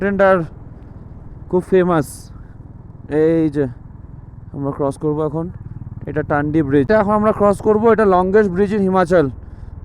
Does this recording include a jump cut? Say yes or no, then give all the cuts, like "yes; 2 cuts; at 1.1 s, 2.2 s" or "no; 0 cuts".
yes; 1 cut; at 6.9 s